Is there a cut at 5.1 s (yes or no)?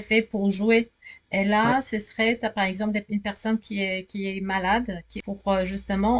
yes